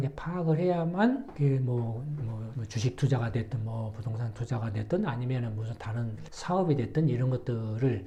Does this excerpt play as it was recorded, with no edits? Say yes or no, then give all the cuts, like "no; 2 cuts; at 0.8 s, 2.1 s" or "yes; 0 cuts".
yes; 0 cuts